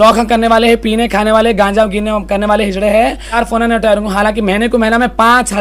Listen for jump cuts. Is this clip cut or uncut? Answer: cut